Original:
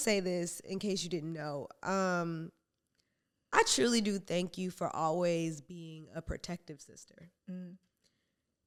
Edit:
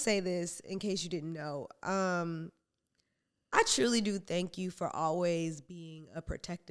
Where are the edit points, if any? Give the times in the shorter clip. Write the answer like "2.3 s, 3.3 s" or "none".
none